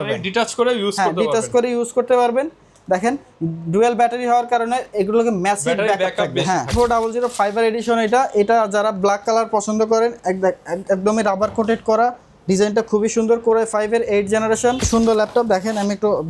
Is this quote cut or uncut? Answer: cut